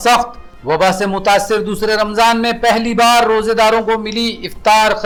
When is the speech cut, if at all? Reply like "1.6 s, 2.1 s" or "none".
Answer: none